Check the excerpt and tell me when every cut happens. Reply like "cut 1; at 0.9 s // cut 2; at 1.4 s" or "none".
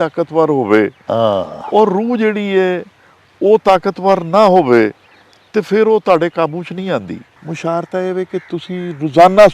cut 1; at 7.3 s